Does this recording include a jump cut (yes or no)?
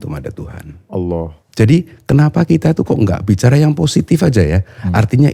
yes